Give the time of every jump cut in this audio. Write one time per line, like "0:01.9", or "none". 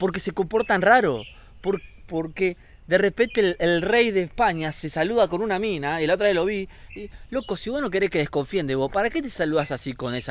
none